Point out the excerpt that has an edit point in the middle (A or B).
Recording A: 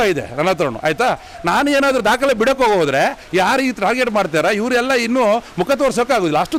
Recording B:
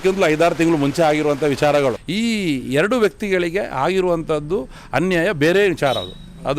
B